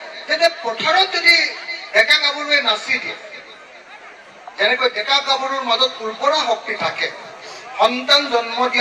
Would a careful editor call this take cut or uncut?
uncut